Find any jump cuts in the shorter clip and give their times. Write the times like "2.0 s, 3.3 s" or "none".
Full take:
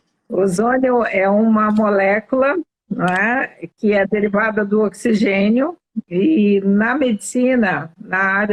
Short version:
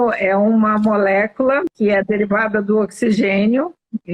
1.7 s

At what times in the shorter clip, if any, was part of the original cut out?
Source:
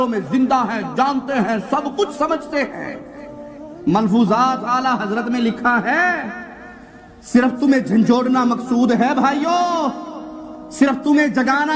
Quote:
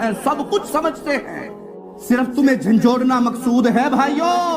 2.1 s

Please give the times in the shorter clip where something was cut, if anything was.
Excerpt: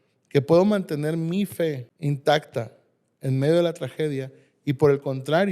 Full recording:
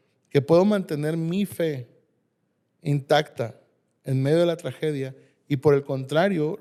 1.9 s

